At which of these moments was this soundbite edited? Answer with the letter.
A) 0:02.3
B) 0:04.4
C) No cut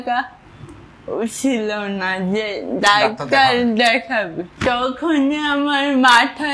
B